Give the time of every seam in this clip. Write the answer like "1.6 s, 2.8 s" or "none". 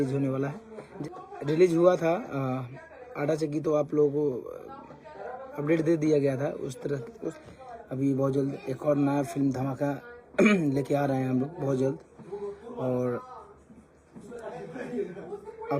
1.0 s, 7.3 s